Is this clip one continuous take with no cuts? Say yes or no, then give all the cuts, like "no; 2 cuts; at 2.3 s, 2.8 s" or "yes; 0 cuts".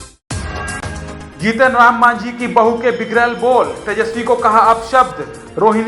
no; 1 cut; at 1.0 s